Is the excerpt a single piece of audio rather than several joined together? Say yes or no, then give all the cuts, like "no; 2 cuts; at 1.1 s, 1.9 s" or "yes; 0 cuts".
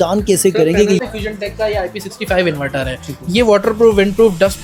no; 1 cut; at 1.0 s